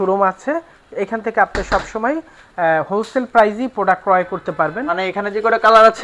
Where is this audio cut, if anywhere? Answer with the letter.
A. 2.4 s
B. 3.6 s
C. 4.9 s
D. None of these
C